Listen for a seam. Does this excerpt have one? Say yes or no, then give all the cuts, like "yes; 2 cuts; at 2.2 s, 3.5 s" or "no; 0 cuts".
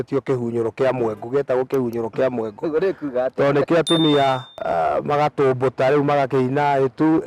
yes; 1 cut; at 4.5 s